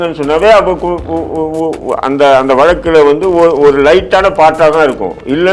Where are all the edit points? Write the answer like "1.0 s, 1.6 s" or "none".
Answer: none